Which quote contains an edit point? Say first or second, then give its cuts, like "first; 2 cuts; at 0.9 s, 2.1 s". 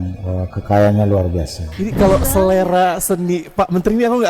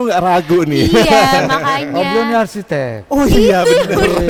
first; 1 cut; at 1.8 s